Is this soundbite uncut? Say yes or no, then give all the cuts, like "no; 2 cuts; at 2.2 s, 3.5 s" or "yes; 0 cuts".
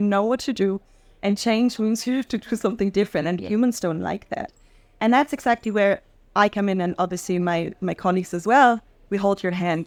yes; 0 cuts